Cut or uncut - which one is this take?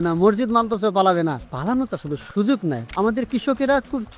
cut